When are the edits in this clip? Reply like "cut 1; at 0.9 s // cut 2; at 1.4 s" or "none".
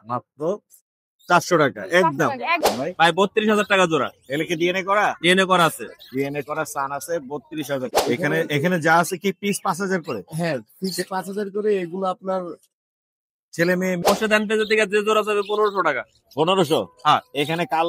cut 1; at 2.6 s // cut 2; at 8.0 s // cut 3; at 14.0 s